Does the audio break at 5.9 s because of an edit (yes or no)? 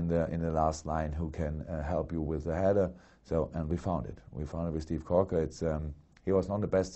no